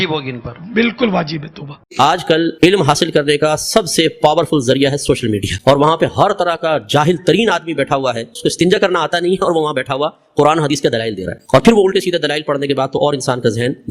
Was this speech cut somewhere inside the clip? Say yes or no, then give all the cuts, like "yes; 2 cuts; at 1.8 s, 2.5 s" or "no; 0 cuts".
yes; 1 cut; at 1.8 s